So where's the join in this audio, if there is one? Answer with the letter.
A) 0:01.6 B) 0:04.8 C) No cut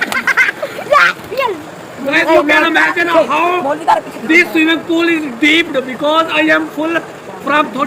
C